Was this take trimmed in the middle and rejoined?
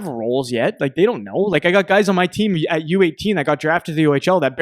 no; 0 cuts

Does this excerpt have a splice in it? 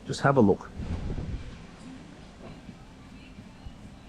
no; 0 cuts

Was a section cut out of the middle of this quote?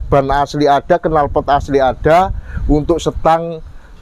no; 0 cuts

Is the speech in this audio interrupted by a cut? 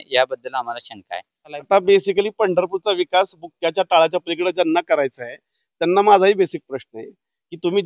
yes; 1 cut; at 1.7 s

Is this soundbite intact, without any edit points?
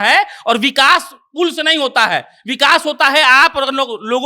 yes; 0 cuts

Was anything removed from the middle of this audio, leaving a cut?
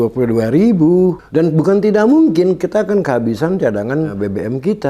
yes; 2 cuts; at 1.2 s, 4.1 s

